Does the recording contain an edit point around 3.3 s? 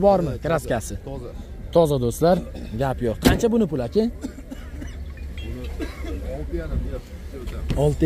no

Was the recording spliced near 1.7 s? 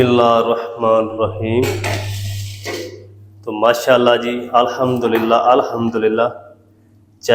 no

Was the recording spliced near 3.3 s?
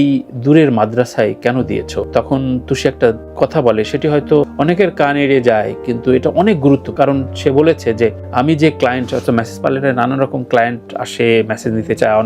no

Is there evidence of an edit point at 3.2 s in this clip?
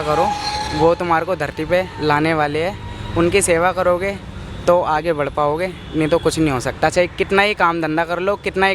no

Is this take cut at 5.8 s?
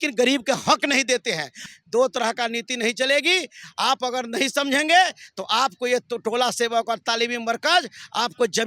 no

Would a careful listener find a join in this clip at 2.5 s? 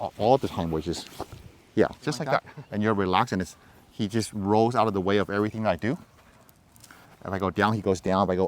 yes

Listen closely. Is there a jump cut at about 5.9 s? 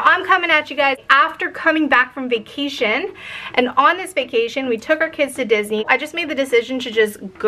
yes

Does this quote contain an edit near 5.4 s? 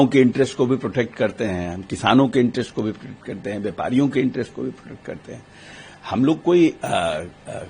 no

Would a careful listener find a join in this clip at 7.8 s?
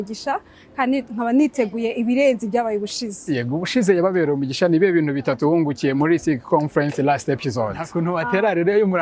yes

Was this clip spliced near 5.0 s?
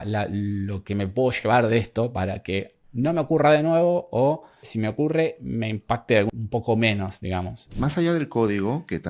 no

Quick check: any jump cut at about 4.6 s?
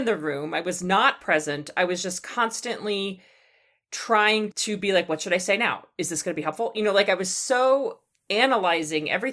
yes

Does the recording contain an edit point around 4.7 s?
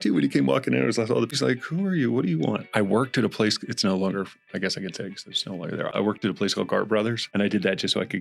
no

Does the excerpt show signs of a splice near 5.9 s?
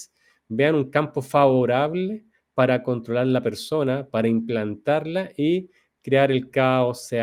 no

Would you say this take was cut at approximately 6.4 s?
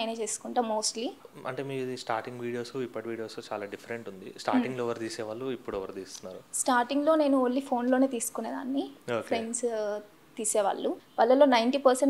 no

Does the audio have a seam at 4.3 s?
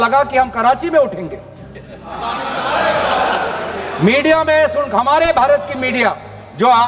no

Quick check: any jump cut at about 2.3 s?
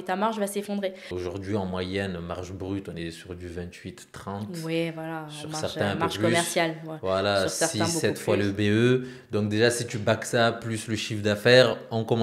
no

